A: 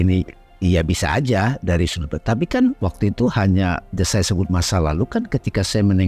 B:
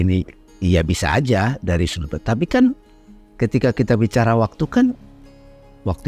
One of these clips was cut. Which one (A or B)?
A